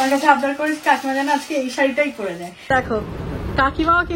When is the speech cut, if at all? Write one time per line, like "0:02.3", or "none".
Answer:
0:02.7